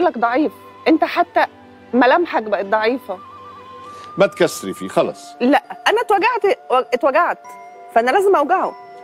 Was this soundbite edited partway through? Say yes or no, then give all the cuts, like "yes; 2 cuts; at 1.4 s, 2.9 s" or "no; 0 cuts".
no; 0 cuts